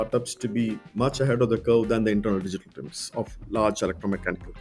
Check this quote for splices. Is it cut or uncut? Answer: uncut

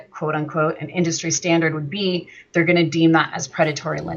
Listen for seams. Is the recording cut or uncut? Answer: uncut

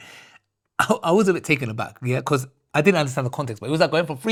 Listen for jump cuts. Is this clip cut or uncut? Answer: uncut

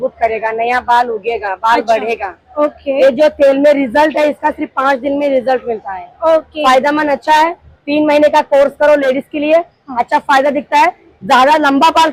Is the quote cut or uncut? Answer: uncut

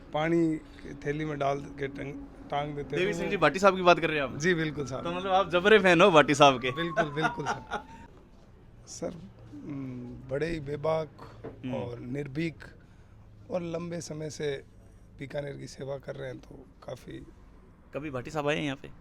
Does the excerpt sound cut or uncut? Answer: cut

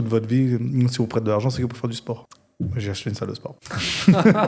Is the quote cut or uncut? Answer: cut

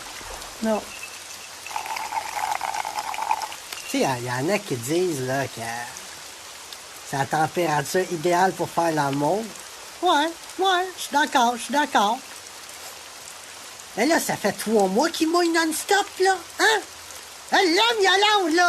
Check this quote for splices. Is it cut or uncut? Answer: cut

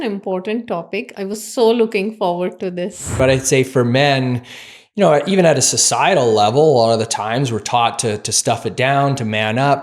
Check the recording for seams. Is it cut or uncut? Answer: cut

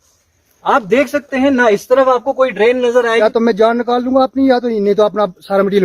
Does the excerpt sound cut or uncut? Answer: cut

